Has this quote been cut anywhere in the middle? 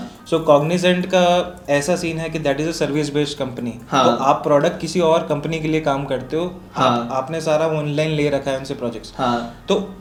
no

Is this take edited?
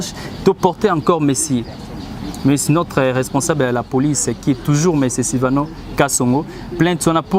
no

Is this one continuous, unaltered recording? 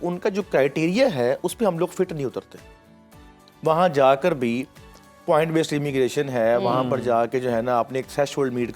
yes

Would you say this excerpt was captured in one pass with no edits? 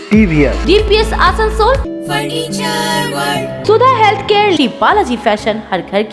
no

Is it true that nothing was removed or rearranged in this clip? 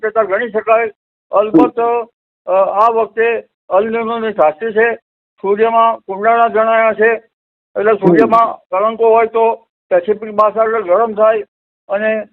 yes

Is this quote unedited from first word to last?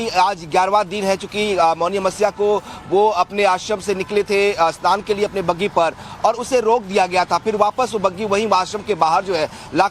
yes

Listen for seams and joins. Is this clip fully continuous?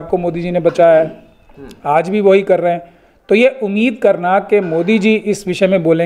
yes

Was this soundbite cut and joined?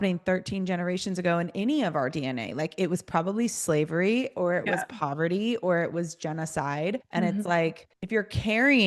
yes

